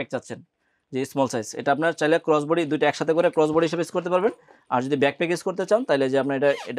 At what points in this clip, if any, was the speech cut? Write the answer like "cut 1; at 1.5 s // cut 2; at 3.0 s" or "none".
none